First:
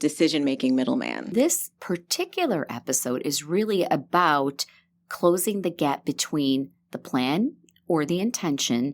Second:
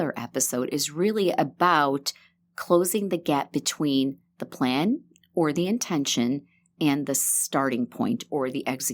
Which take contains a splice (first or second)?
first